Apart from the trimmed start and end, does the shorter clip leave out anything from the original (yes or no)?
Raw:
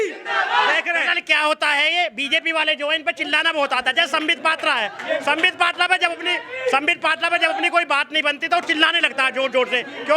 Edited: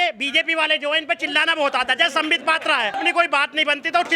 yes